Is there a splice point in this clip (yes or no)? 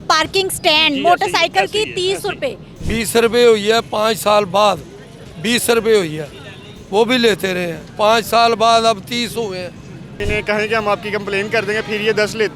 yes